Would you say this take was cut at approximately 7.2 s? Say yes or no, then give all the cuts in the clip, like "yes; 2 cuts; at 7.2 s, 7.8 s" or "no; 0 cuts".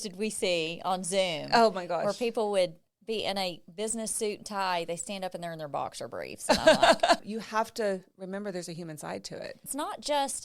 yes; 2 cuts; at 7.2 s, 9.7 s